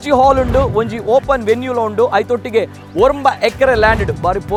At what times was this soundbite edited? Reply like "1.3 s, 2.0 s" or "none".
none